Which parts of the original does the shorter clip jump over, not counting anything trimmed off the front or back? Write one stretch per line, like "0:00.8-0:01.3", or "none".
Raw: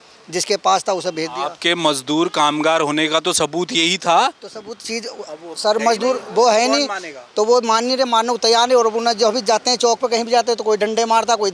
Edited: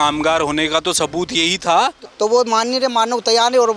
0:04.4-0:07.2